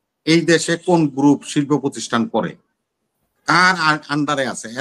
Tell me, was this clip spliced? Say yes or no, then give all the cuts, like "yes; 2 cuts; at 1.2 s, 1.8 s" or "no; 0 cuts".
no; 0 cuts